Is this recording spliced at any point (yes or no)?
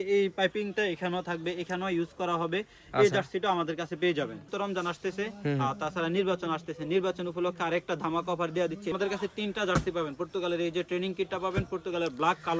yes